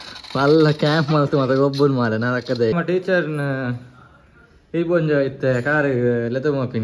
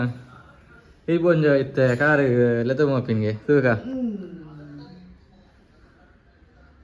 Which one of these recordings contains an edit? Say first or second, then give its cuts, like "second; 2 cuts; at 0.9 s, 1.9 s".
first; 1 cut; at 2.7 s